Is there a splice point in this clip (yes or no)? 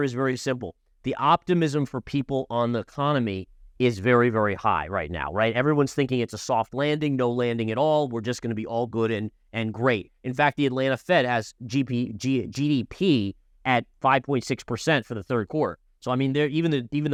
no